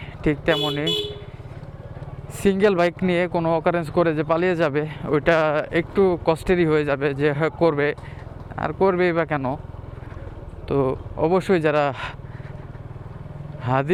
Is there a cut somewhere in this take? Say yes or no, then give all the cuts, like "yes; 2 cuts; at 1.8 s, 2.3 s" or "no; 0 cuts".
no; 0 cuts